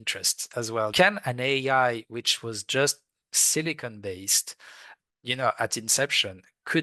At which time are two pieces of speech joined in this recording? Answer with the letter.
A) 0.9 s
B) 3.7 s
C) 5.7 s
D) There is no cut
A